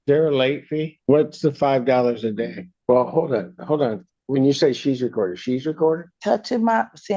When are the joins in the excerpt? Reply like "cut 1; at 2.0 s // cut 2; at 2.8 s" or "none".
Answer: cut 1; at 0.9 s // cut 2; at 2.7 s